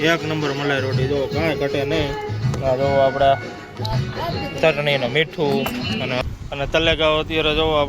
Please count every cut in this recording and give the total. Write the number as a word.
one